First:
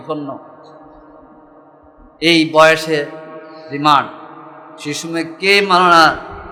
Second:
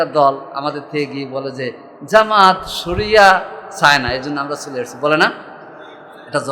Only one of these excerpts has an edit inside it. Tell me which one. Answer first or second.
second